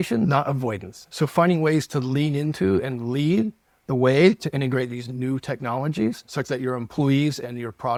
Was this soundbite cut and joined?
no; 0 cuts

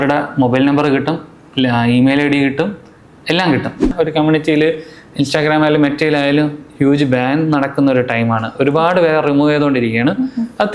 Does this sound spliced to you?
yes; 1 cut; at 3.9 s

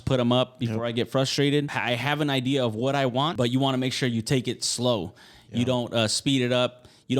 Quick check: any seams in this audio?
yes; 2 cuts; at 1.7 s, 3.3 s

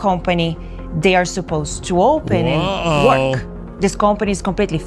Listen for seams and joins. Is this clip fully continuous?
no; 1 cut; at 2.6 s

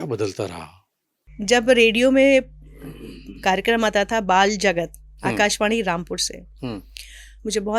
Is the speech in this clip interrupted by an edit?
yes; 1 cut; at 1.3 s

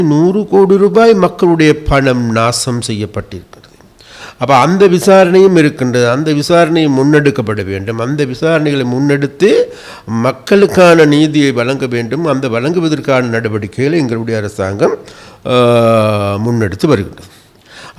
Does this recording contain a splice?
no; 0 cuts

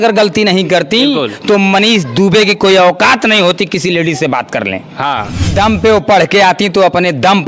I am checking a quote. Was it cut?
yes; 1 cut; at 5.5 s

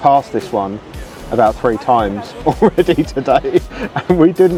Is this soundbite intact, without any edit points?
yes; 0 cuts

